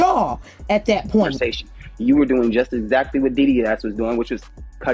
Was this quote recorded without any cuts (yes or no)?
no